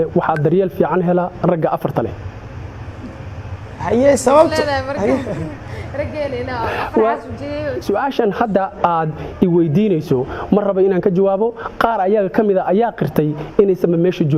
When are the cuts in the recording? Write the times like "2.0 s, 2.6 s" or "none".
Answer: 7.8 s